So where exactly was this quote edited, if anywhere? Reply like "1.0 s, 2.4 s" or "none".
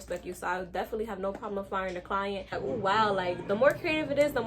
2.5 s